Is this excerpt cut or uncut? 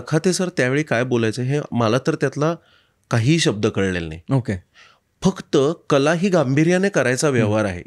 uncut